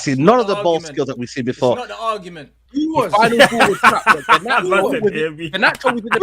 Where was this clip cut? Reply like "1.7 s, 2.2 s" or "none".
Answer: 2.6 s